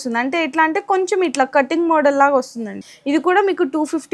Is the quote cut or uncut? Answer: cut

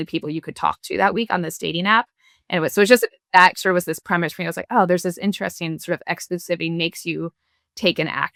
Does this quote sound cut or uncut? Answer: uncut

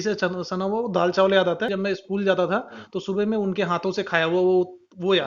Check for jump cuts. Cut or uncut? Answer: cut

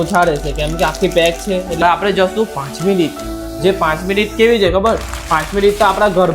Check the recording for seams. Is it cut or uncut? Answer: cut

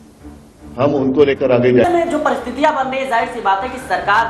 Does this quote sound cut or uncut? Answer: cut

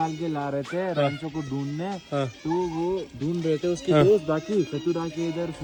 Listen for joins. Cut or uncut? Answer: uncut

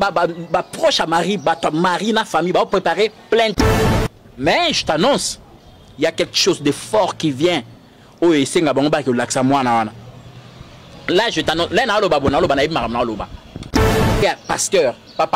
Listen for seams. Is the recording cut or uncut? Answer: cut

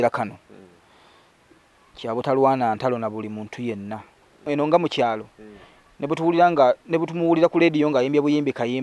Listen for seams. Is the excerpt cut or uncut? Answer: cut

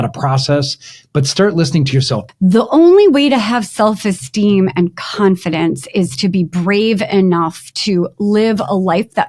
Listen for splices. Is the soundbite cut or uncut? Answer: cut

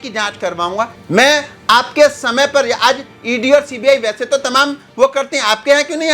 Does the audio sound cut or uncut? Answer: cut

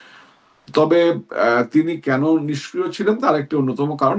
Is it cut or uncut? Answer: uncut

